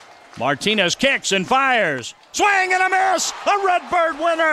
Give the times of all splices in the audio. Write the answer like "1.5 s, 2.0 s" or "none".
none